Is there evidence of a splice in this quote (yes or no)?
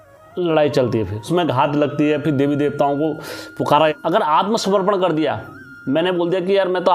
yes